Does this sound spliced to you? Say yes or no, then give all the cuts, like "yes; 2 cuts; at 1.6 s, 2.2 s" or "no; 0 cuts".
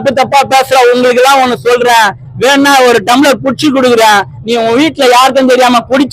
no; 0 cuts